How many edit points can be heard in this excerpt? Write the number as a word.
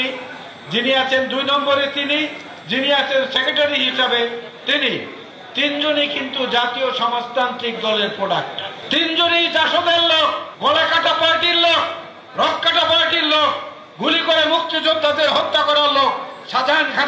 zero